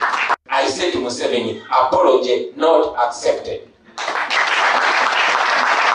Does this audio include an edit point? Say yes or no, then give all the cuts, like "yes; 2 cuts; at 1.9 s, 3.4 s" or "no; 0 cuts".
yes; 1 cut; at 3.0 s